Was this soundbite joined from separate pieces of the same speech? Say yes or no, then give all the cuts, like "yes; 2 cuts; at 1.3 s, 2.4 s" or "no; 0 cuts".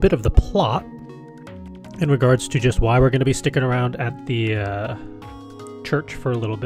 no; 0 cuts